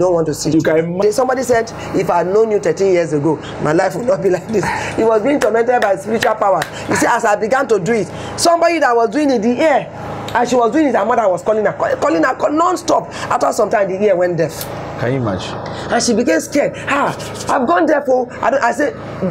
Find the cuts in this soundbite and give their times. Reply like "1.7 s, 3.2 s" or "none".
1.0 s

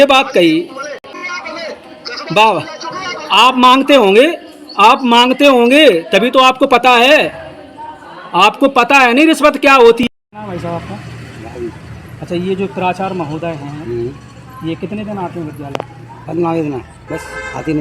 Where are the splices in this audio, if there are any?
1.1 s, 10.1 s

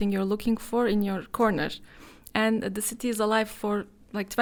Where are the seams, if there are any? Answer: none

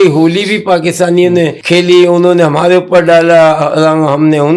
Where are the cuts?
1.6 s

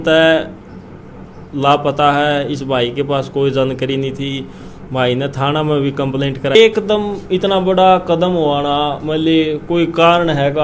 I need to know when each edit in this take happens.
6.6 s

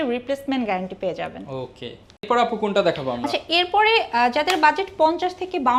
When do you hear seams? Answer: none

